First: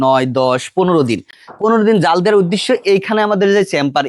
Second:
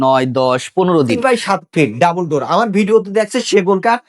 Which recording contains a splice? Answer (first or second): second